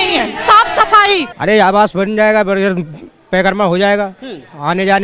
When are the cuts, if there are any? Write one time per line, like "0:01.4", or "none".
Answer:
0:01.3

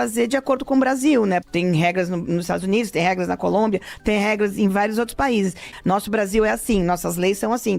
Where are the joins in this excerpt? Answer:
0:01.5
0:05.6

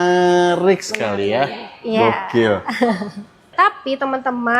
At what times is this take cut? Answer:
0:03.5

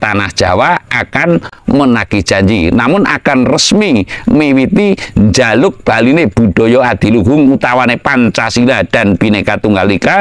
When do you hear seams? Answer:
0:01.5

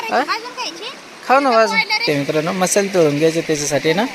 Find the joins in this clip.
0:02.0

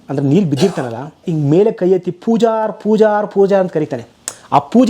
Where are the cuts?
0:01.2

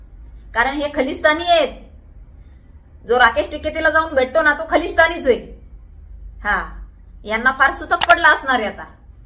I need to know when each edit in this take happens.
none

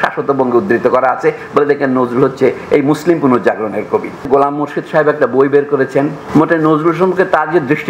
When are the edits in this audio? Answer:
0:04.2
0:06.2

